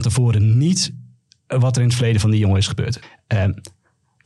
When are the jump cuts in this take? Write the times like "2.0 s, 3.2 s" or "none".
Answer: 3.0 s